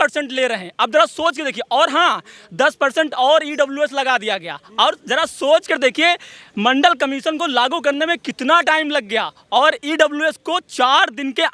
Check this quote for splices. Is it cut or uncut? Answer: uncut